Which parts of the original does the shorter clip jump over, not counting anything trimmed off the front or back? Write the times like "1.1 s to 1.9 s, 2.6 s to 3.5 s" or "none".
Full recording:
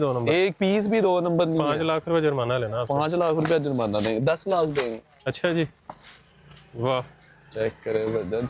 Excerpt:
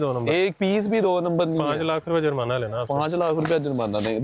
none